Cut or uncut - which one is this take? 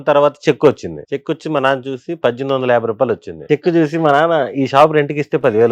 cut